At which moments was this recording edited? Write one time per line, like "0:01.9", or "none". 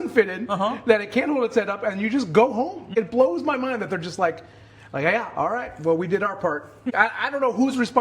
0:02.9
0:06.9